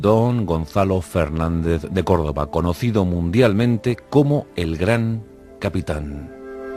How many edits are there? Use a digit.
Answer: 0